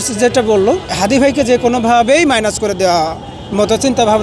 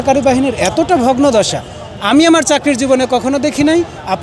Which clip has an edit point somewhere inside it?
first; 1 cut; at 0.9 s

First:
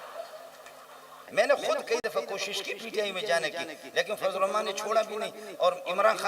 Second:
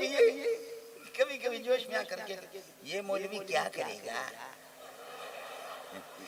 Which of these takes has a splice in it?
first; 1 cut; at 1.2 s

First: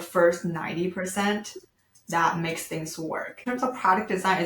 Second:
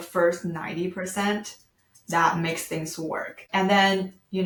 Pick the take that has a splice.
first; 1 cut; at 3.5 s

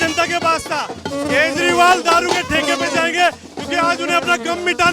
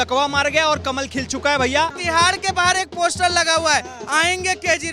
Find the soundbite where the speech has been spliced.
second; 1 cut; at 1.9 s

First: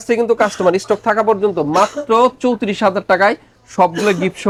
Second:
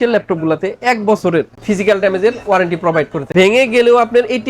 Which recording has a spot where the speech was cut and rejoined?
second; 1 cut; at 3.2 s

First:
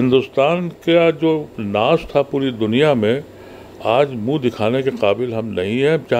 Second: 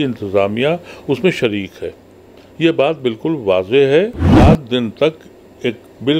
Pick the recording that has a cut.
second; 1 cut; at 4.3 s

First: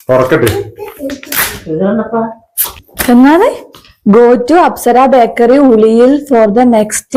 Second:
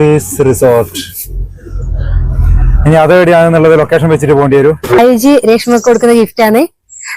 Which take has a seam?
second; 1 cut; at 5.0 s

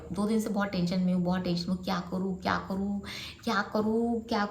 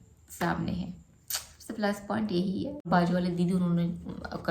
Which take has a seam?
second; 1 cut; at 2.9 s

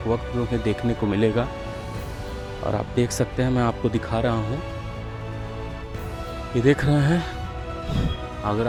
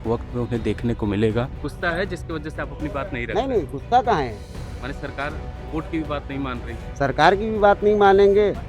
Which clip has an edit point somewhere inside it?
second; 1 cut; at 1.6 s

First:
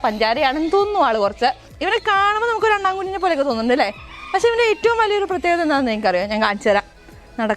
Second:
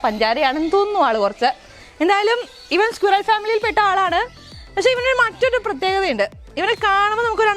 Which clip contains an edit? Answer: first; 1 cut; at 1.7 s

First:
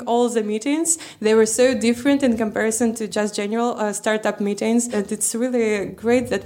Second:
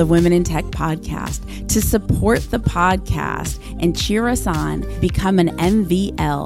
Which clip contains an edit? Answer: first; 1 cut; at 4.9 s

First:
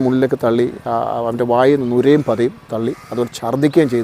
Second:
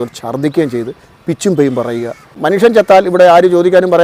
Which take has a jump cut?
second; 1 cut; at 2.3 s

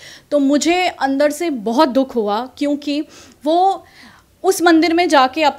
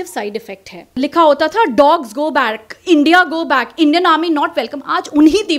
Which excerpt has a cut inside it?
second; 1 cut; at 1.0 s

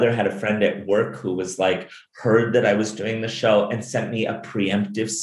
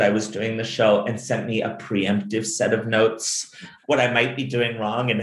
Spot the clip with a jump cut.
second; 1 cut; at 3.7 s

